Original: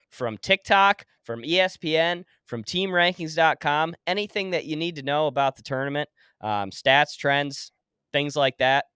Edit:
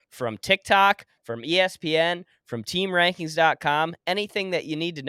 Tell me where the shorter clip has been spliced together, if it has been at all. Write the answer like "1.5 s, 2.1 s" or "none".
none

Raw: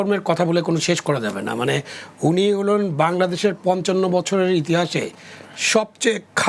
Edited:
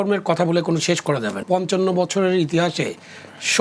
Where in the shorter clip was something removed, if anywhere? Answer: 1.4 s

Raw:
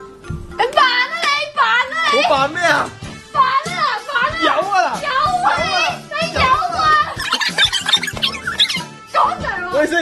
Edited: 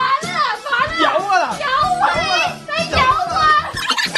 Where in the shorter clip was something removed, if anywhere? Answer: none

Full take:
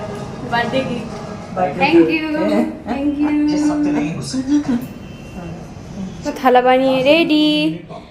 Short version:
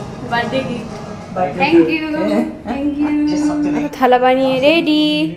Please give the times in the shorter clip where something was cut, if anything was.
3.9 s

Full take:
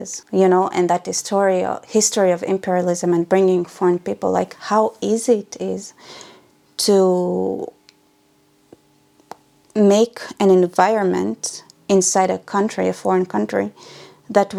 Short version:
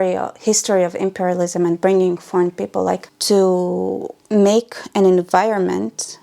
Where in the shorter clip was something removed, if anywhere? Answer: 3.1 s, 4.1 s

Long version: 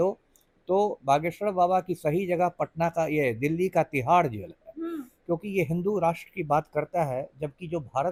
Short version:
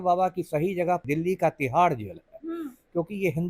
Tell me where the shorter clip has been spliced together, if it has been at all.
1.0 s

